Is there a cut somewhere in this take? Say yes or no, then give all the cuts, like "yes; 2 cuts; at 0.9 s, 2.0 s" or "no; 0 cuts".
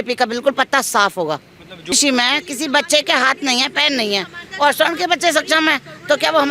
yes; 1 cut; at 1.9 s